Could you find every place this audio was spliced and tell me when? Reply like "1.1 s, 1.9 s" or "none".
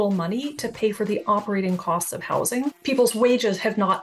2.8 s

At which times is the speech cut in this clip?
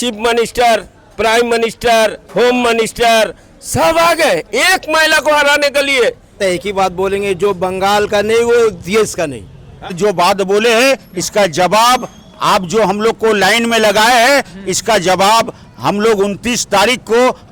6.4 s, 10.0 s

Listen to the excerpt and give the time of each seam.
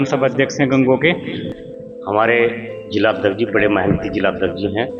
1.4 s

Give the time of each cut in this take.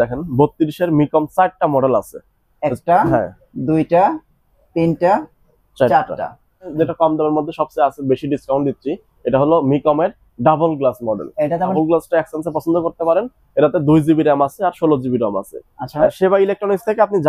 6.7 s, 11.7 s, 16.1 s

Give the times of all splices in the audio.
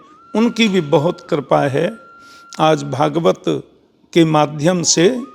none

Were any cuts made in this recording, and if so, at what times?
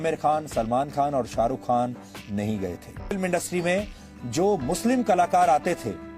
3.1 s

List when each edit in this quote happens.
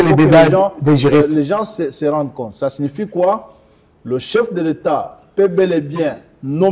none

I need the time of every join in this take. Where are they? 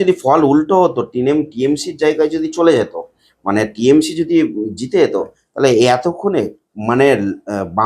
none

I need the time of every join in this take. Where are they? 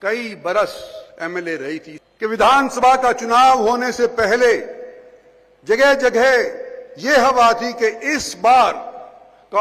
2.0 s

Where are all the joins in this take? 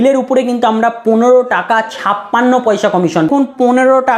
3.3 s

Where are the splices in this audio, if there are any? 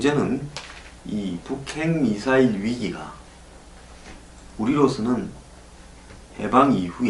none

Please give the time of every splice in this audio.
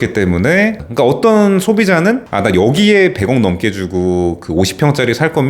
0.8 s, 2.3 s

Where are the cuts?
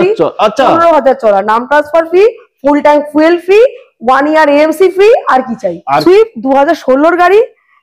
6.0 s

